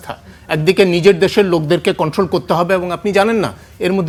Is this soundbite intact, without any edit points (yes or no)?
yes